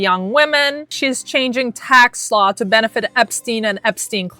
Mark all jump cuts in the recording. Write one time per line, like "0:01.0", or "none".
0:00.9

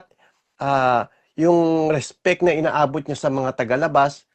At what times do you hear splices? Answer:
none

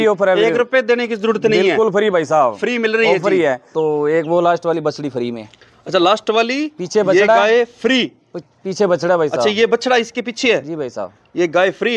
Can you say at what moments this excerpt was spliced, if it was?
0:03.7

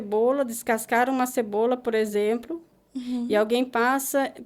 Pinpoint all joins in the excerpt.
none

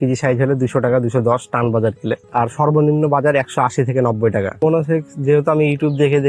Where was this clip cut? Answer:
0:02.2
0:04.5

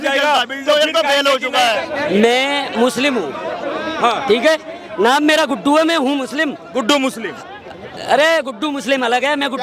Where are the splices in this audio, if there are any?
0:01.9

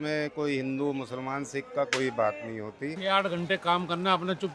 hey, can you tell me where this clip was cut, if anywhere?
0:02.9

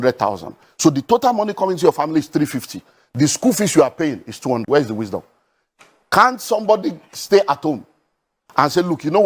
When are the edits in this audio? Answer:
0:04.6

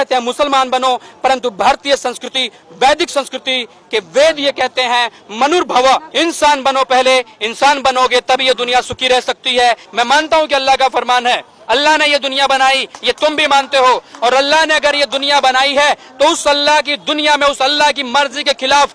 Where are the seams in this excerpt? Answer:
0:06.1
0:09.9

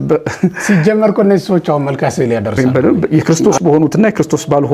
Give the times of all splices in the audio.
0:02.6

